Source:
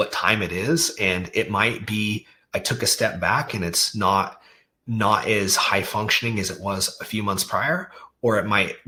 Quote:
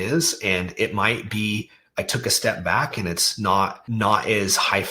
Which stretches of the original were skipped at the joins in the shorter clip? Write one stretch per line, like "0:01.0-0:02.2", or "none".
0:04.4-0:04.8